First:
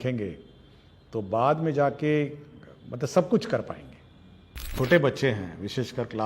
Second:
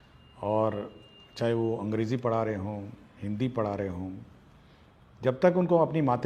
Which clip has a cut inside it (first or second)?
first